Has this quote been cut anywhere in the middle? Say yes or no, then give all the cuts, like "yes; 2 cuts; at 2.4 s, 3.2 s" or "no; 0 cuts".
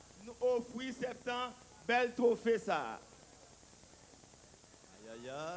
no; 0 cuts